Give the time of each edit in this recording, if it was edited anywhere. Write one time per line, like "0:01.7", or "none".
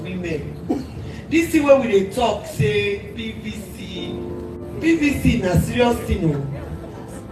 none